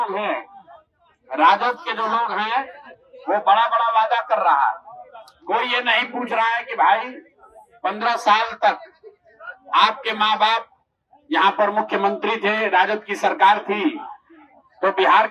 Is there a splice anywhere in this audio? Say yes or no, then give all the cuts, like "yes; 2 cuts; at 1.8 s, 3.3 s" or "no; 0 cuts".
no; 0 cuts